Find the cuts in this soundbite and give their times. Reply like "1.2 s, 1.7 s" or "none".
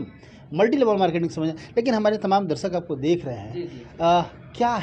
none